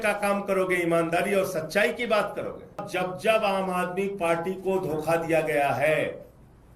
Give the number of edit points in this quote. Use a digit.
1